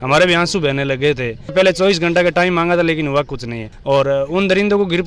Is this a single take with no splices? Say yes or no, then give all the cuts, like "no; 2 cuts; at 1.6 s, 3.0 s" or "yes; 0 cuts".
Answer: no; 1 cut; at 1.5 s